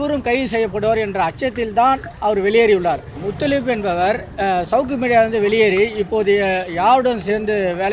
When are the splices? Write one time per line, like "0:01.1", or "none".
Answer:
0:03.2
0:04.3